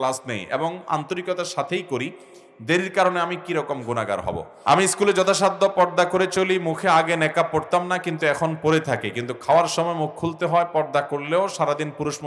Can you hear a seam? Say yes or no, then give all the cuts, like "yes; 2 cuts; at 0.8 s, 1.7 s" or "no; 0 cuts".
yes; 1 cut; at 4.5 s